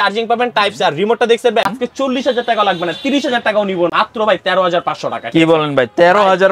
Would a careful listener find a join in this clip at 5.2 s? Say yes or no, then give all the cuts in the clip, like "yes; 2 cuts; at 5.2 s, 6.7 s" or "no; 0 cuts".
no; 2 cuts; at 1.7 s, 3.9 s